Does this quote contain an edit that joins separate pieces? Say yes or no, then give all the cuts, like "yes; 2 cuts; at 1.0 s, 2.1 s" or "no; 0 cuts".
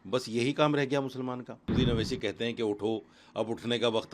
yes; 1 cut; at 1.7 s